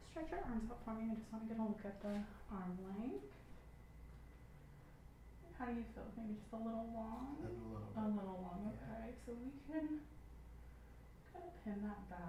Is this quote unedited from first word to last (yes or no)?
yes